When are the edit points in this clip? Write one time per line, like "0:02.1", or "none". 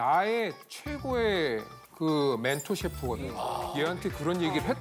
0:03.6